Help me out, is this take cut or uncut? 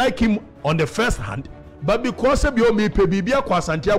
uncut